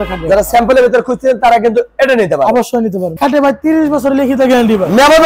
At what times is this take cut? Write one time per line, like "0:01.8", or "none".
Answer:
0:03.2